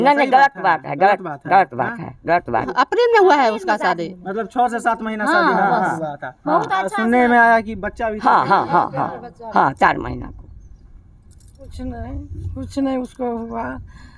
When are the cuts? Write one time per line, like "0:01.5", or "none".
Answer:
0:02.7
0:11.6